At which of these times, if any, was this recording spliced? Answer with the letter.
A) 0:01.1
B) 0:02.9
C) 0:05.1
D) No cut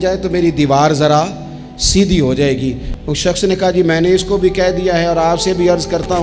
B